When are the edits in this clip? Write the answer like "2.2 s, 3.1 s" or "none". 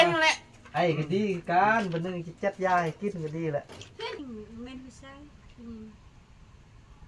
4.2 s

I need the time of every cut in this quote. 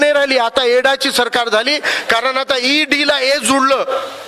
none

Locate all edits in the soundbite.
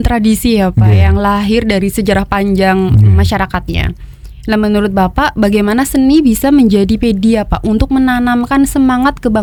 none

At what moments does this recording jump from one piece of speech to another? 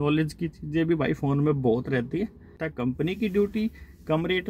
2.6 s

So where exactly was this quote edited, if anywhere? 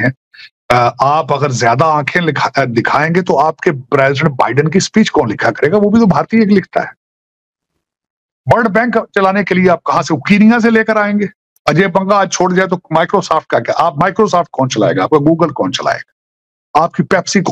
11.3 s

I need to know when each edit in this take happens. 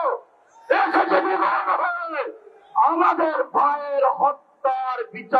none

